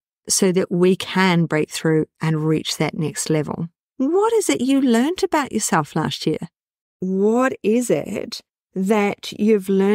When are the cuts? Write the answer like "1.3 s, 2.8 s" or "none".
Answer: 3.8 s, 6.7 s